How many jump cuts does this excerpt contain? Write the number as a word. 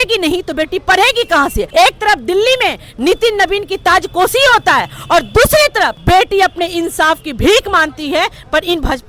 two